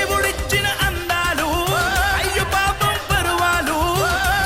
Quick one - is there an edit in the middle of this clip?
no; 0 cuts

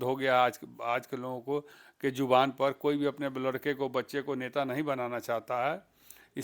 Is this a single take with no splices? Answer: yes; 0 cuts

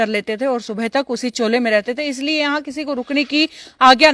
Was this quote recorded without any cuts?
yes; 0 cuts

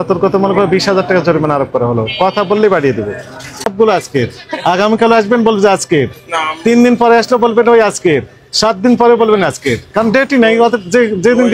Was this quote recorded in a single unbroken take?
no; 1 cut; at 3.7 s

